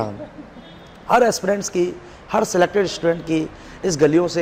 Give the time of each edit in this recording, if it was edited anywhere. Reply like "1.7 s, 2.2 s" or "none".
none